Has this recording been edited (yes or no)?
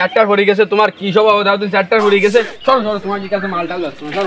no